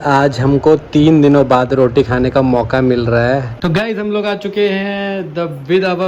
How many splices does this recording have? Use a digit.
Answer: 1